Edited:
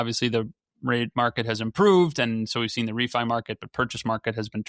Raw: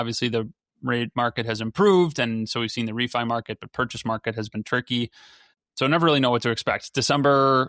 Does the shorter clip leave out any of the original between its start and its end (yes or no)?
no